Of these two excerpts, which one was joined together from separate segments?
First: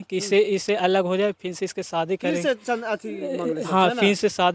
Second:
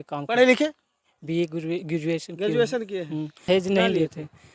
second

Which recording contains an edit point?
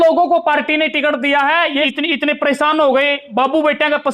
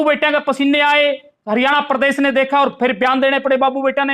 first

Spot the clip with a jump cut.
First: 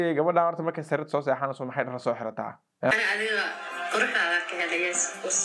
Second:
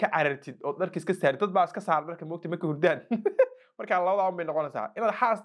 first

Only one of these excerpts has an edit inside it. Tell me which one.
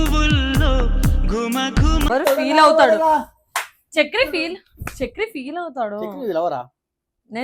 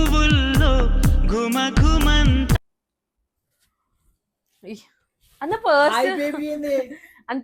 first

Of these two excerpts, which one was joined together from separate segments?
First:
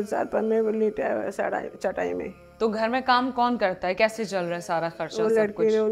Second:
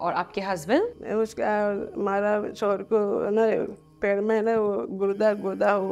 second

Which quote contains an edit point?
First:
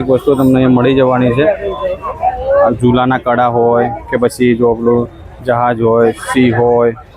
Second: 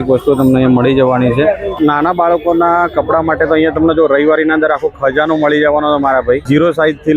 second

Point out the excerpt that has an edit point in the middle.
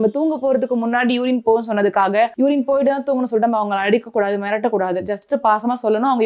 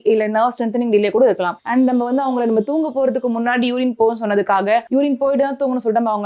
second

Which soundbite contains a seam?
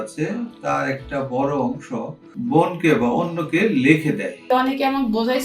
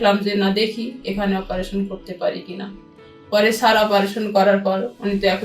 first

